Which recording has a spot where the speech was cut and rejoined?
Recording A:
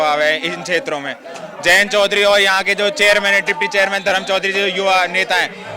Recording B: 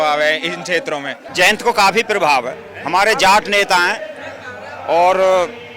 B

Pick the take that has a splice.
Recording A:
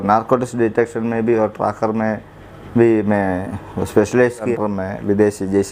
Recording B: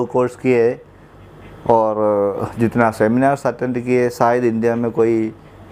A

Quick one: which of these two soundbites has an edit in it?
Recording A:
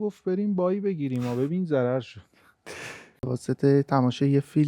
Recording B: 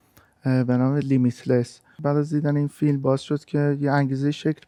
A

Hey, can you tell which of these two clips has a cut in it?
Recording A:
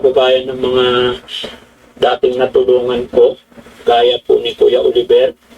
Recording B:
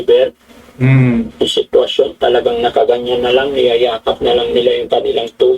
A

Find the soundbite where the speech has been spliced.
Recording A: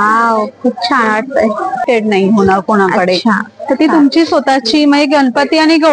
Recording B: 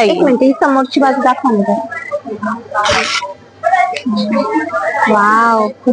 A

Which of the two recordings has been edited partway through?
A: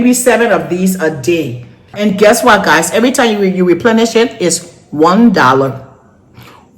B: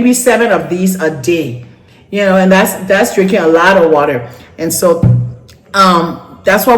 A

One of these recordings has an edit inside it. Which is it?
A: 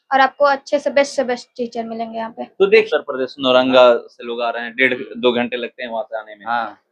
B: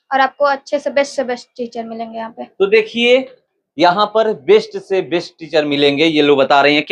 A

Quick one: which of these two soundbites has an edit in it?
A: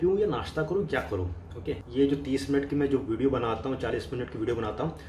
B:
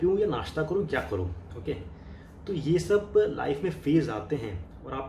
A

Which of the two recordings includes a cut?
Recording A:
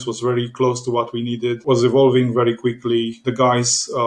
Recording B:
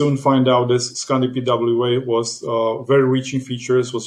A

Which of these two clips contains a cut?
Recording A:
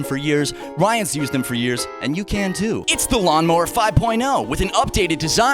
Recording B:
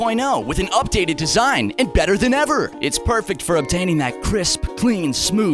A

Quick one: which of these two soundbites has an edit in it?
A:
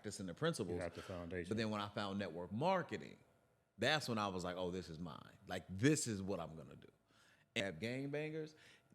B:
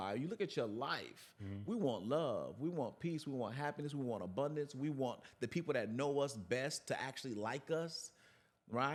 A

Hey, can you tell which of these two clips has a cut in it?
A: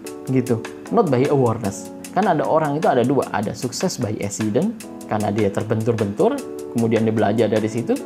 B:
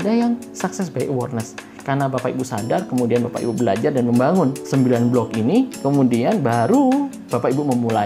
B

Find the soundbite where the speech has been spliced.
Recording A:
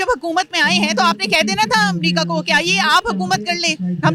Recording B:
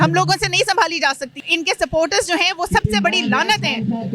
B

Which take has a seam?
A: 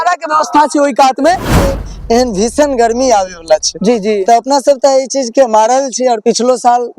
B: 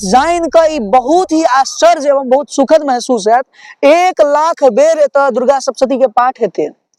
A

